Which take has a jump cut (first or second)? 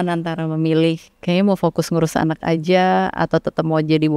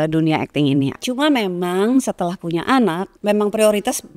second